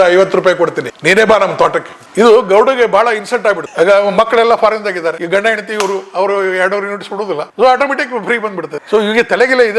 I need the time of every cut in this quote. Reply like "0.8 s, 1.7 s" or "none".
3.7 s, 5.2 s